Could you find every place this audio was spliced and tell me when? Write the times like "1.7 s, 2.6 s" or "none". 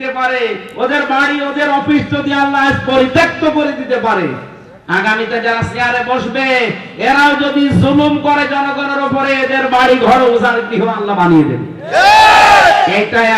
none

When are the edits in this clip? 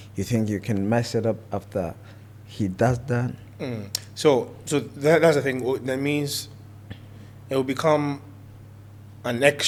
none

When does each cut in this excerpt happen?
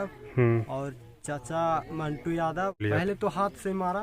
2.8 s

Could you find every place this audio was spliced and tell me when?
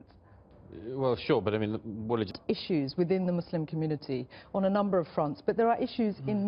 2.3 s

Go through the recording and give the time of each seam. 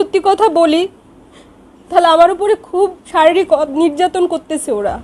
3.0 s

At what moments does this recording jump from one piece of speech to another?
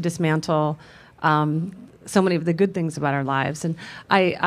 2.7 s

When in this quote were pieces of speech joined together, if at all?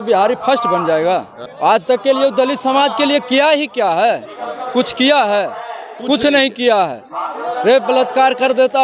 1.8 s

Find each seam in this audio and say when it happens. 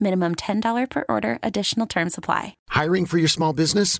2.6 s

